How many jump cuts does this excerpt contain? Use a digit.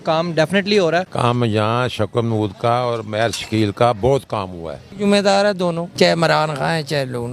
3